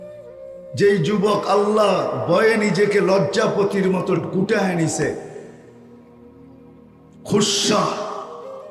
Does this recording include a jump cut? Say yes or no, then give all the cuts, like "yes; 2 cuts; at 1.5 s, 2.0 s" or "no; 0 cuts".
no; 0 cuts